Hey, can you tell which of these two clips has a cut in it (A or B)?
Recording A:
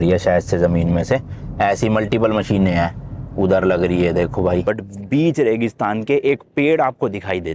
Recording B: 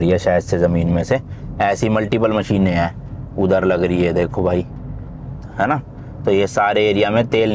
A